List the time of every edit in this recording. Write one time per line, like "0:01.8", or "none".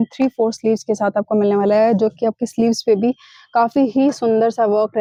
none